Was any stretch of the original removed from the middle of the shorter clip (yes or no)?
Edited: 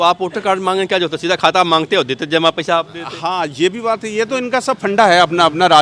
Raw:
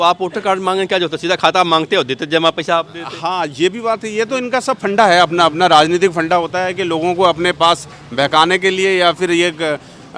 no